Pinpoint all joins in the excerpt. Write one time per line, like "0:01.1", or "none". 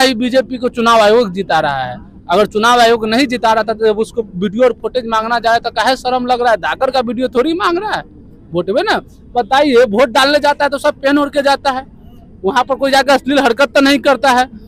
none